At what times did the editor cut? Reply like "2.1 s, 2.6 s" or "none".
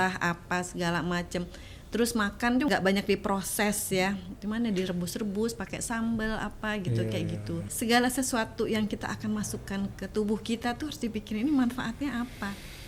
2.7 s, 7.6 s, 9.9 s